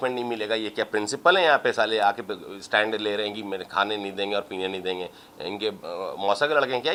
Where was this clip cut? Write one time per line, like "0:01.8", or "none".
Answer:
none